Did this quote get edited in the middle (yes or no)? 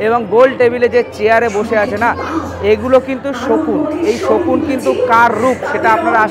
no